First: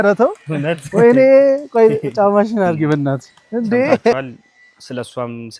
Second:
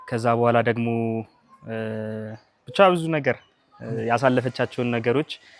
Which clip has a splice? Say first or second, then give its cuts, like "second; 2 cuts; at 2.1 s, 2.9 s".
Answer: first; 1 cut; at 4.1 s